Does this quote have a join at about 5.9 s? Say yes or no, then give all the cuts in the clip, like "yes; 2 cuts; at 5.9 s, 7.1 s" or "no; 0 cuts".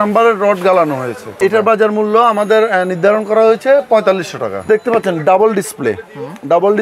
no; 2 cuts; at 1.4 s, 4.6 s